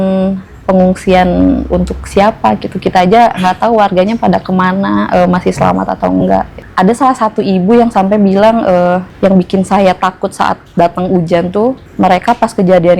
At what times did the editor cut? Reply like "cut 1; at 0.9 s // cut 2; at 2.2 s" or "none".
cut 1; at 6.6 s // cut 2; at 9.1 s // cut 3; at 11.9 s